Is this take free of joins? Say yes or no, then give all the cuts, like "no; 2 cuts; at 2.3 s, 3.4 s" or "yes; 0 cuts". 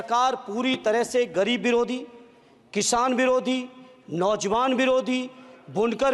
yes; 0 cuts